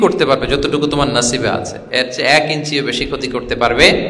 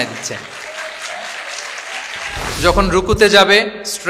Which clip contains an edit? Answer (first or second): second